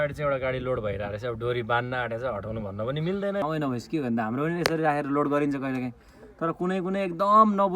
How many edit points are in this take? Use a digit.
1